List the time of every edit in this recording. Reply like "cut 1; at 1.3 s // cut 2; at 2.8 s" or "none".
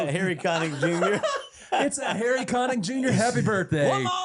none